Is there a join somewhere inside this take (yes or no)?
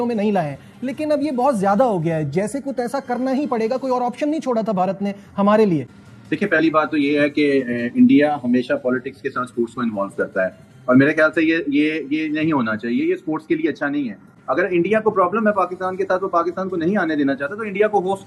no